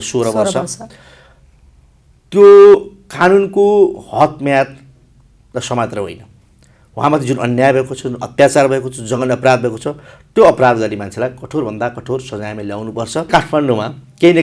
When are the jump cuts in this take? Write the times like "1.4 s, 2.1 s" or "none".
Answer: 13.3 s